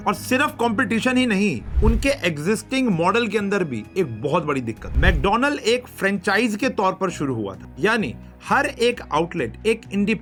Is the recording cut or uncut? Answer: uncut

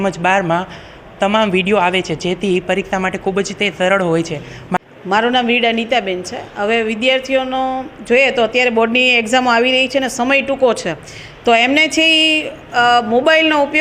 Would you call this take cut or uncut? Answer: cut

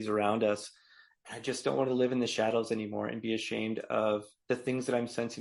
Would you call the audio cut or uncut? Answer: uncut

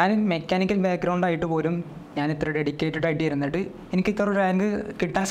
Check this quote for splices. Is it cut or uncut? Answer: uncut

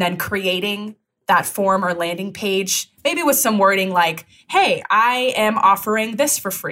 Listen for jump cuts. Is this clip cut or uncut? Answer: uncut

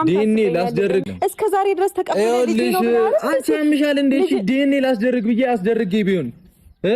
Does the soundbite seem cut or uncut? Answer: cut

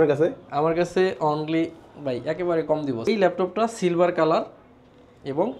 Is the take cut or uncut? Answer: cut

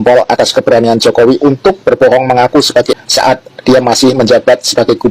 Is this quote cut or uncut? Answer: cut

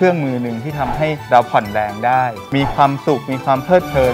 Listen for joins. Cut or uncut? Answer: uncut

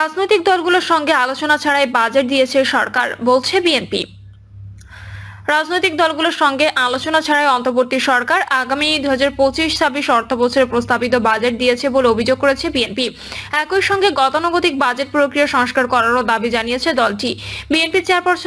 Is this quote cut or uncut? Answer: uncut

